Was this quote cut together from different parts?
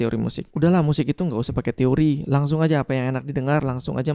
no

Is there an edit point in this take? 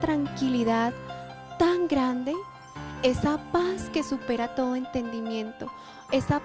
yes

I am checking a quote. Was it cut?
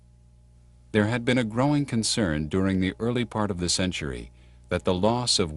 no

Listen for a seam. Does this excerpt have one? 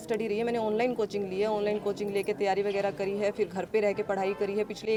no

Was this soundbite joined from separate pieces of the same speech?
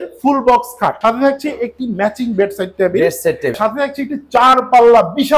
yes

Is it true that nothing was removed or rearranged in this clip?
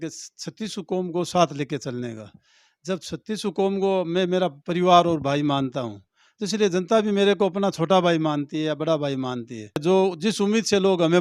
no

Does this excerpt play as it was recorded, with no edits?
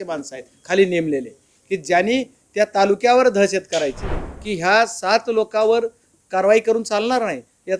no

